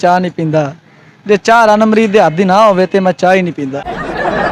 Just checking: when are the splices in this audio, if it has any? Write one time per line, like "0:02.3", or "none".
none

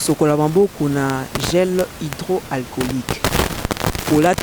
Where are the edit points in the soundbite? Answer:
none

